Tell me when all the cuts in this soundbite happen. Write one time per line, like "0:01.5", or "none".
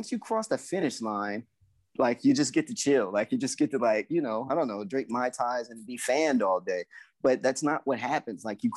none